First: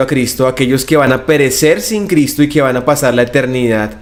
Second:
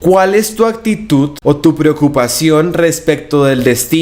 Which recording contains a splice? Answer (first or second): second